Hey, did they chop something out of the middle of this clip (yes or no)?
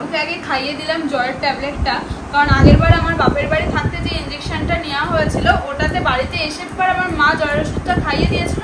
no